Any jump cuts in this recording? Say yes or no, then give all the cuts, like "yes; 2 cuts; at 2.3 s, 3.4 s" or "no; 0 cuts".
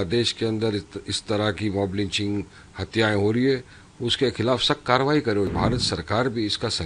yes; 1 cut; at 5.5 s